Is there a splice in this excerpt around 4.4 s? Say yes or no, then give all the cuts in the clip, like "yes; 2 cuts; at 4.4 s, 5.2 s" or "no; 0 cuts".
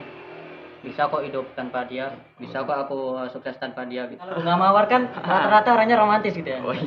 yes; 1 cut; at 4.4 s